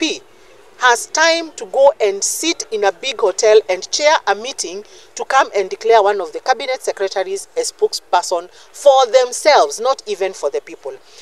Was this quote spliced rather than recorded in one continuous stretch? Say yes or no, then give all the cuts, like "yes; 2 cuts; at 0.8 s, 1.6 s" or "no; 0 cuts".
no; 0 cuts